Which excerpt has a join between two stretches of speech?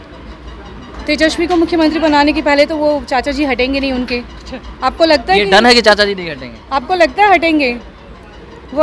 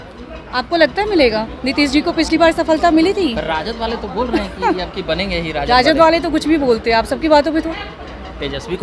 second; 1 cut; at 7.7 s

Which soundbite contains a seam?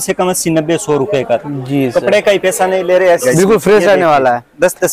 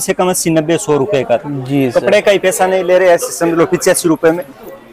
first; 1 cut; at 3.2 s

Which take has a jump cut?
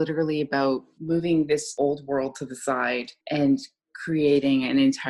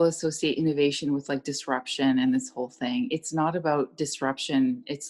first; 3 cuts; at 0.9 s, 1.7 s, 3.1 s

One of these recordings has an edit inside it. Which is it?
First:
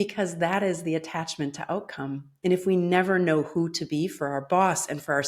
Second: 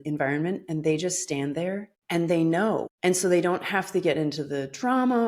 second; 2 cuts; at 1.9 s, 2.9 s

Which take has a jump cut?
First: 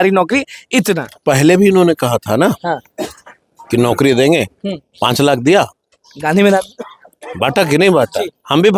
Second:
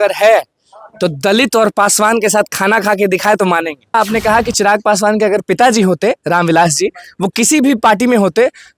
second; 1 cut; at 3.9 s

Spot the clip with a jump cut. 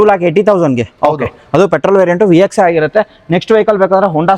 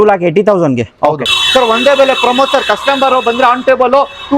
second; 1 cut; at 1.3 s

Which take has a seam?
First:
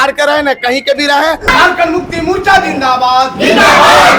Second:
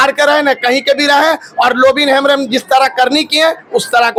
first; 1 cut; at 1.5 s

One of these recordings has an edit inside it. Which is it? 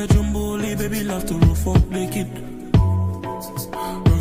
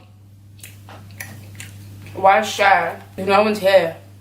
second; 1 cut; at 3.1 s

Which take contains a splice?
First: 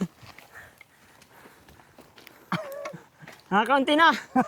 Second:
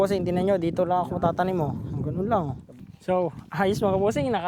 second; 1 cut; at 2.9 s

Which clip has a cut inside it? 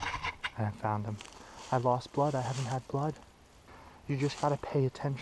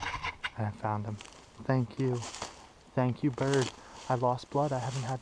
first; 2 cuts; at 1.5 s, 3.8 s

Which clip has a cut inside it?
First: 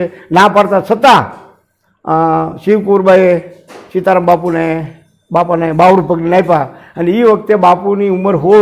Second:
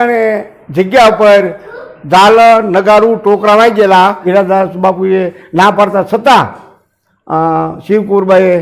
second; 1 cut; at 4.2 s

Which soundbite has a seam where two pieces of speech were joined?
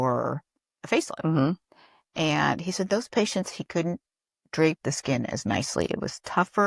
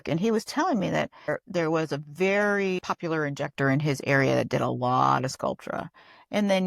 second; 2 cuts; at 1.3 s, 2.8 s

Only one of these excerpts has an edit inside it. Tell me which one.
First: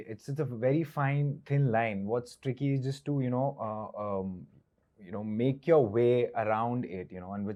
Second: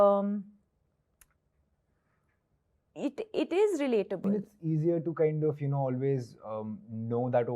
second; 1 cut; at 4.2 s

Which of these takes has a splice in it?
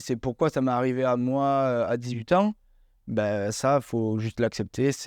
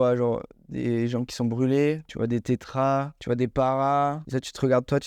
second; 3 cuts; at 2.1 s, 3.1 s, 4.2 s

